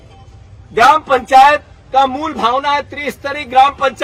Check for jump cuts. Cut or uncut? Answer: uncut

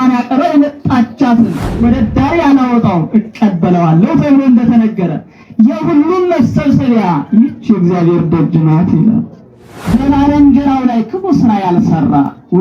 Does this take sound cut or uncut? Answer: cut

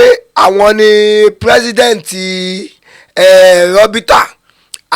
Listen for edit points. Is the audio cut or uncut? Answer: uncut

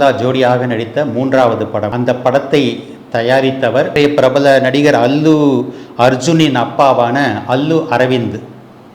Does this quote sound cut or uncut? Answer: cut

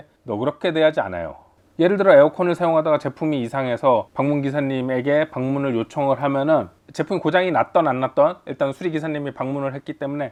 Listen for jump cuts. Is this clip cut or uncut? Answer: uncut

